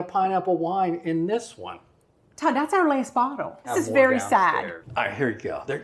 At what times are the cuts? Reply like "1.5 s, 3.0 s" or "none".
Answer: 3.7 s, 4.8 s